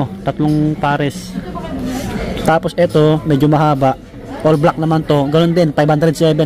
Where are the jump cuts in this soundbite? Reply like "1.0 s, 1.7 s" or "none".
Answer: none